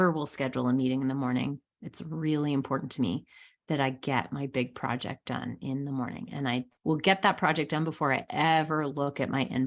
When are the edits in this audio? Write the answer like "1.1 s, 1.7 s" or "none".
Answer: 6.7 s